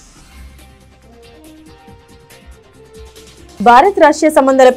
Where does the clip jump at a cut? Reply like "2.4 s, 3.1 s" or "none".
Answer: 0.9 s, 2.3 s